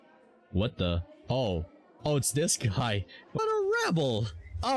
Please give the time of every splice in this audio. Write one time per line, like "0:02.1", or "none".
0:03.4

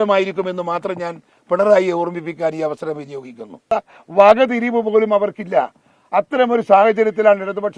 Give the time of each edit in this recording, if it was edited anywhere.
0:03.6

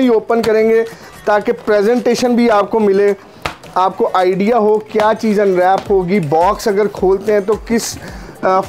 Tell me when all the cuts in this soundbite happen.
none

